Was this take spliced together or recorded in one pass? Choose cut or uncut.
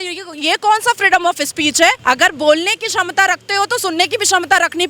cut